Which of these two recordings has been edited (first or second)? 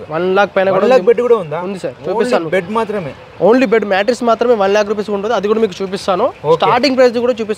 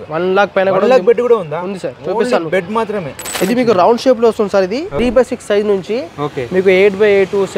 second